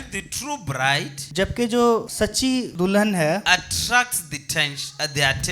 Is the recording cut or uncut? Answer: cut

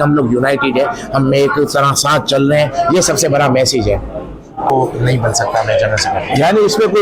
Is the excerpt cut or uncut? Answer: cut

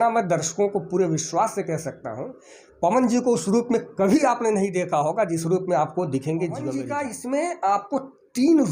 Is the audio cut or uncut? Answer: cut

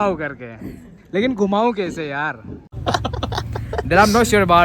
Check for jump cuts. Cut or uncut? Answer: cut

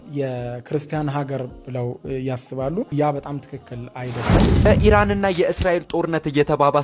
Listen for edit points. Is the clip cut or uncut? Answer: cut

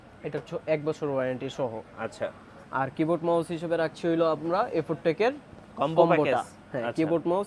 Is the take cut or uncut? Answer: uncut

